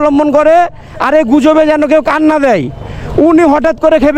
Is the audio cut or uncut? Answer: uncut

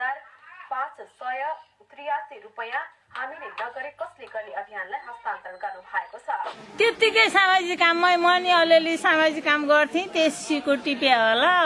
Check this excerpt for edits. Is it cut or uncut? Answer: cut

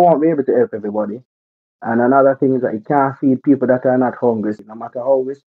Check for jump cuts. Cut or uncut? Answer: cut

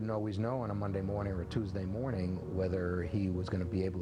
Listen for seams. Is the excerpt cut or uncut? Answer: uncut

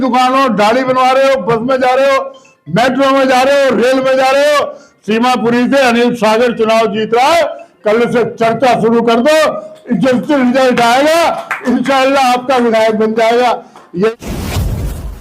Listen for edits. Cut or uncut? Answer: cut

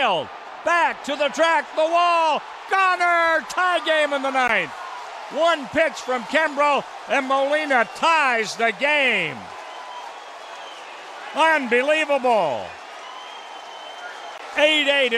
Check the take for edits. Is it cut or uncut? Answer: uncut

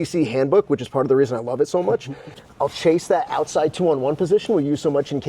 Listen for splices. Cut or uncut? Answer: cut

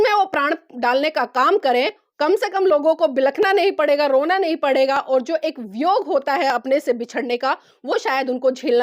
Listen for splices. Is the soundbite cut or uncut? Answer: uncut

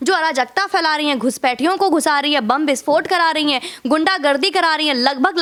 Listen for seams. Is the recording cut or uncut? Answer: uncut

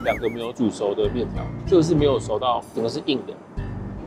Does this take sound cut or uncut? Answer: uncut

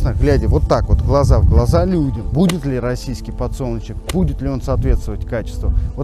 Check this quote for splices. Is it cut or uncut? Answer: uncut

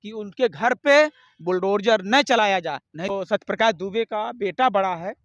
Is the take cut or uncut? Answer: cut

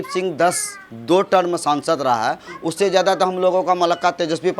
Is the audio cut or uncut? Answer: uncut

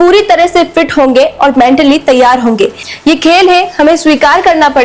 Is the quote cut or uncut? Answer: cut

